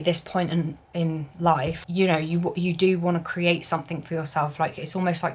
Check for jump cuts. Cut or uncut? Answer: uncut